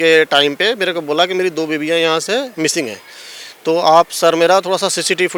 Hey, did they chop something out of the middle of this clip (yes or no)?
no